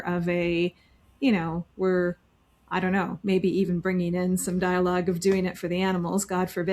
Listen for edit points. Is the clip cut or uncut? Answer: uncut